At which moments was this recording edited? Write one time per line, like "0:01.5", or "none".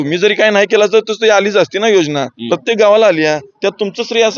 none